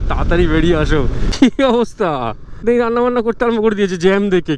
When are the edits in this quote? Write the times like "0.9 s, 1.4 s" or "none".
1.2 s, 2.6 s

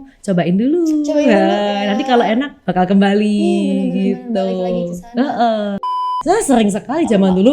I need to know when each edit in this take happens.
6.0 s

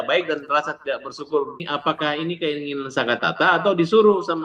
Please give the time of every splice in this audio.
1.6 s

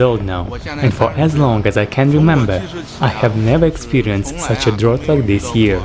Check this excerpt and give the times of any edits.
none

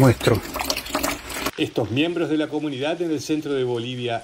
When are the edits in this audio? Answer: 1.5 s

